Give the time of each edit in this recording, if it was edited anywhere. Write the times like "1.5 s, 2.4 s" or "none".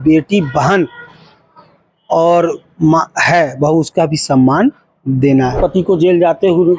5.6 s